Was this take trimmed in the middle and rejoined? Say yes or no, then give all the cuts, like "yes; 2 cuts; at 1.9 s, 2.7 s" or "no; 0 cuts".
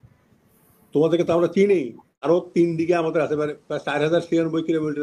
yes; 1 cut; at 2.1 s